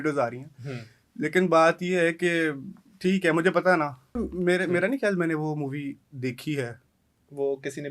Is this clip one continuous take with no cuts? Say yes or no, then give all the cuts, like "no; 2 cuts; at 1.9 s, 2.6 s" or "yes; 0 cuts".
no; 1 cut; at 4.2 s